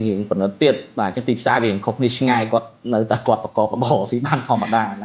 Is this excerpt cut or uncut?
uncut